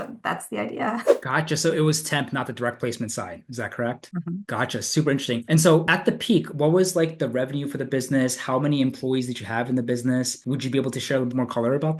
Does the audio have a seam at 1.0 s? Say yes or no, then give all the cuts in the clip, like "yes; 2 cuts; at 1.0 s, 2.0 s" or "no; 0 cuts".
no; 0 cuts